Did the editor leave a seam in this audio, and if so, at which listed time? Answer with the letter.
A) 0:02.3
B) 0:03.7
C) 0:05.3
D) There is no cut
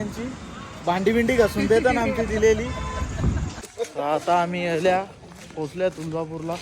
B